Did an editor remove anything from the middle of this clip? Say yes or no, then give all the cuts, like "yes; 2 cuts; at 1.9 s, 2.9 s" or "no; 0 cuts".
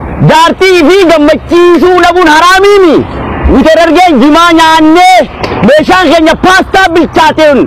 no; 0 cuts